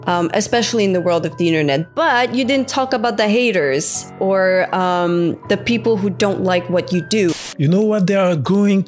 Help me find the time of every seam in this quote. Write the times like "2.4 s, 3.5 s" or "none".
7.3 s